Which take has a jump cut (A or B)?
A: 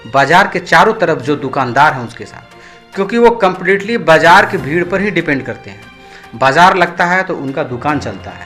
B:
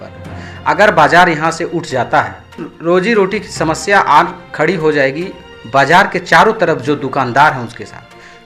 B